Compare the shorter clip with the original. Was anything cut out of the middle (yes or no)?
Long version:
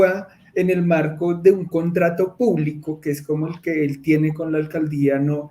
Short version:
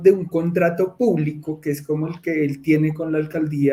no